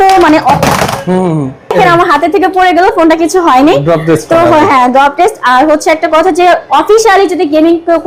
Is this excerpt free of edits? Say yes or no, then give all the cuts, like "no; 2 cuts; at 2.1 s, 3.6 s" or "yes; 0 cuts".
yes; 0 cuts